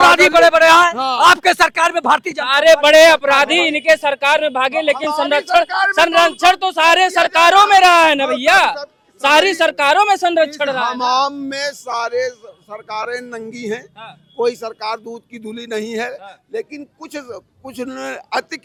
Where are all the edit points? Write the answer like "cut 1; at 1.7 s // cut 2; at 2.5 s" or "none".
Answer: none